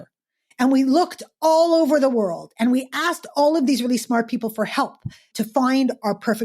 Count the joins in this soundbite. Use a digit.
1